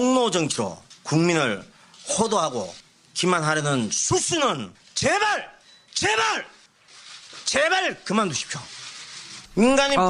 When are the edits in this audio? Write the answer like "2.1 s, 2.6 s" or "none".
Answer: 8.7 s